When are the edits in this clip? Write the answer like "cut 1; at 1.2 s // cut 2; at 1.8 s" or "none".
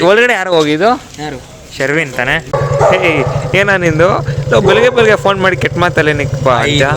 cut 1; at 2.4 s